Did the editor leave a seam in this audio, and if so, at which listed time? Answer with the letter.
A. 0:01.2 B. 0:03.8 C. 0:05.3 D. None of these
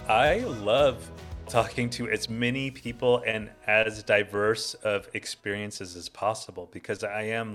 A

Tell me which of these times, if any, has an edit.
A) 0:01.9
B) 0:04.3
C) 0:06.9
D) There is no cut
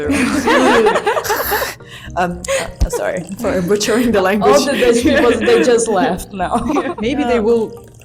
C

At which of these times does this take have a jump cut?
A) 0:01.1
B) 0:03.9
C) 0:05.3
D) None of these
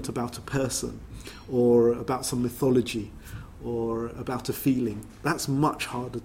D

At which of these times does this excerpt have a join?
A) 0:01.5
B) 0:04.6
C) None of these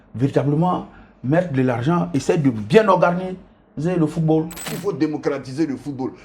B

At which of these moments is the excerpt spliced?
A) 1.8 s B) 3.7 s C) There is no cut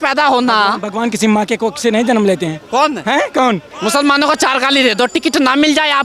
B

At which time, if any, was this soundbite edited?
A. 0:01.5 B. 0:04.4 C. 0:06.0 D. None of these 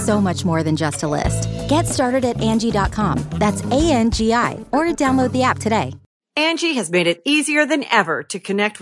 C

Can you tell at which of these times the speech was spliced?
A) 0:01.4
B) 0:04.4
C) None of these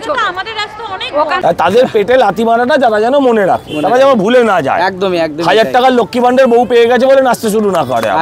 A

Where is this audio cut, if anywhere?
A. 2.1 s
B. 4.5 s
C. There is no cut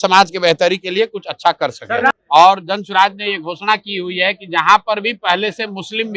A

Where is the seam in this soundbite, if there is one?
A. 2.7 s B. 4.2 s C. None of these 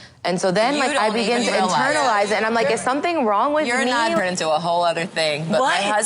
B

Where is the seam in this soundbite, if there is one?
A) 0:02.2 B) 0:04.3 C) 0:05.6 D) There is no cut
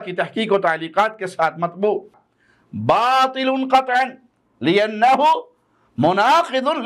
A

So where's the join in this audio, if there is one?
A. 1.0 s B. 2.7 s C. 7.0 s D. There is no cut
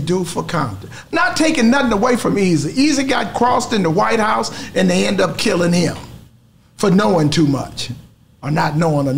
D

